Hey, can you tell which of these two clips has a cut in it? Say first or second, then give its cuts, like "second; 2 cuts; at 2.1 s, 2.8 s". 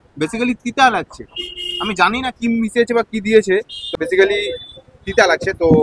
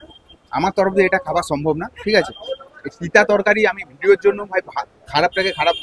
first; 1 cut; at 3.9 s